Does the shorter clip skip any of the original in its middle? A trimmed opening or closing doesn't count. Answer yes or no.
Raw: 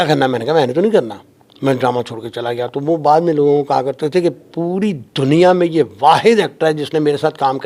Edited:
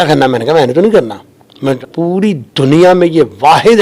yes